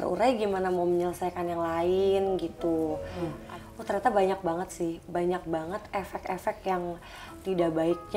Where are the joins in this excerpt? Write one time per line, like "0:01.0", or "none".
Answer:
0:03.4